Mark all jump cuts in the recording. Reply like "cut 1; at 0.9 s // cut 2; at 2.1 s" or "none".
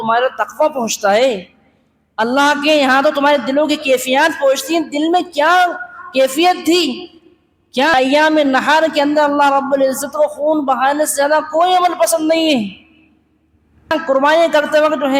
cut 1; at 7.9 s // cut 2; at 13.9 s